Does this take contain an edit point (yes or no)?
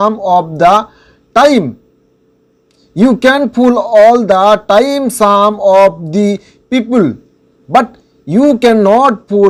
no